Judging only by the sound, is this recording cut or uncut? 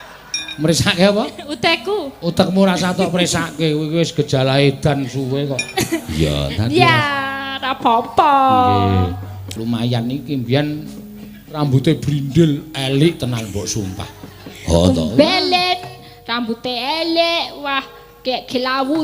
cut